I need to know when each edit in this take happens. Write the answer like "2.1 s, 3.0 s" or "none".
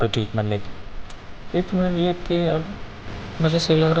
none